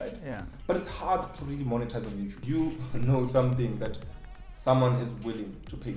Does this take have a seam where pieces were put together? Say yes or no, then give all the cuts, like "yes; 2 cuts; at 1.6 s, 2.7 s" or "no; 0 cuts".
yes; 1 cut; at 2.4 s